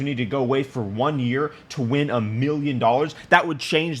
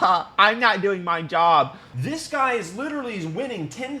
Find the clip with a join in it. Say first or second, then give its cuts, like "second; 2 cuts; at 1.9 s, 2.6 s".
second; 1 cut; at 1.8 s